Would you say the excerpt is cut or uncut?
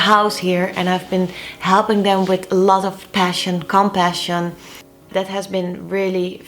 cut